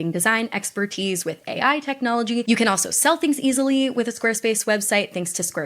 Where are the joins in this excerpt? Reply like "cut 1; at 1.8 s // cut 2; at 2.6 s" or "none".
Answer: cut 1; at 2.4 s